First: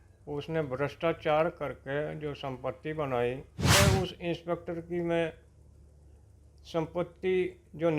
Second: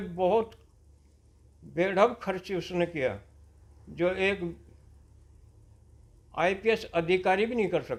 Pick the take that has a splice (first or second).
first